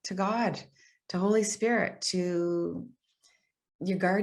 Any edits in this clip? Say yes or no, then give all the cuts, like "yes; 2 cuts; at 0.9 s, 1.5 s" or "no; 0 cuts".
no; 0 cuts